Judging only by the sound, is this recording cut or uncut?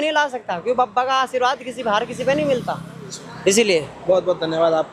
uncut